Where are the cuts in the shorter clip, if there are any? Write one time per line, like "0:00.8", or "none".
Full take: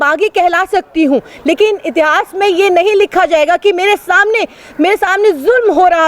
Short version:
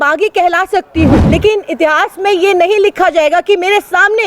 0:01.2